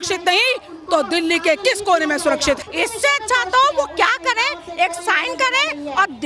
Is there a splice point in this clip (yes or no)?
yes